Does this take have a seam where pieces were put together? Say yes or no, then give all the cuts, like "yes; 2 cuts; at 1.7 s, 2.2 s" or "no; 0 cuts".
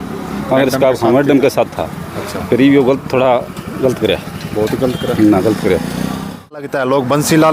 yes; 1 cut; at 6.6 s